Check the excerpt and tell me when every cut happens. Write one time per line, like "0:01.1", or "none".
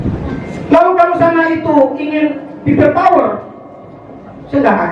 none